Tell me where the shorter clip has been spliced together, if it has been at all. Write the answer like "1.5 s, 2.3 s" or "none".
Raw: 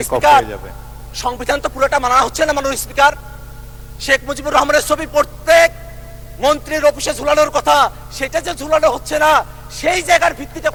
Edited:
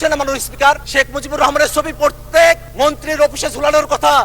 0.8 s, 2.7 s